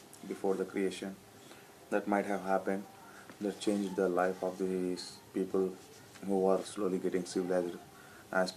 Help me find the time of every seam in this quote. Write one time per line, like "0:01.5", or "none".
0:01.4